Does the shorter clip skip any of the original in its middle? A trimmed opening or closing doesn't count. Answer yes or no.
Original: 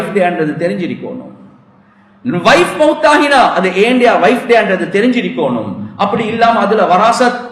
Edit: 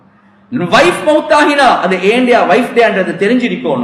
no